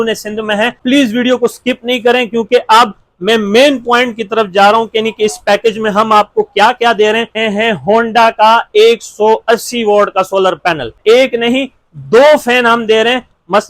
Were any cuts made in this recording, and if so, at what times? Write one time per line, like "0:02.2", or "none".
0:00.8
0:07.4
0:10.9